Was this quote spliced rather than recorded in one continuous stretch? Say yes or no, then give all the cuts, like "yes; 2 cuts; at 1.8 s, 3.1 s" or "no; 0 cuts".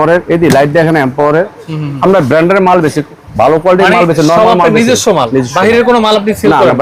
no; 0 cuts